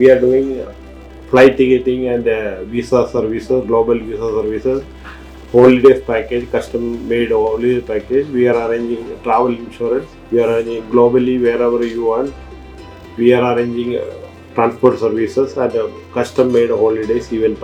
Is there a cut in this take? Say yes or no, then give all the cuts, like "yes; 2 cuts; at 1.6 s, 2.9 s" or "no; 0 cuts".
no; 0 cuts